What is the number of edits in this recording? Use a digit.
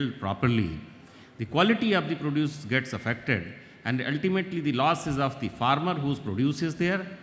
0